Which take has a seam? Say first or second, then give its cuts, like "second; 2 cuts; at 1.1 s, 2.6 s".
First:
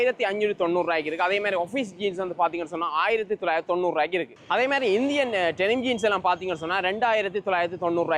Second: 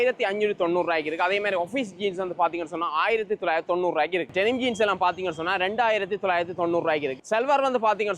second; 2 cuts; at 4.3 s, 7.1 s